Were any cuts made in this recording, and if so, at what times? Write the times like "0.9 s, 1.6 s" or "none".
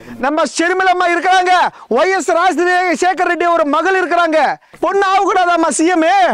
4.7 s